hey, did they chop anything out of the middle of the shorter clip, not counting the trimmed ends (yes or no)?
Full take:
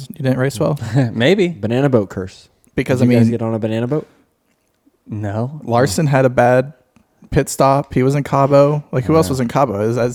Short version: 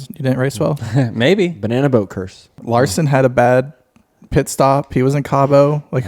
yes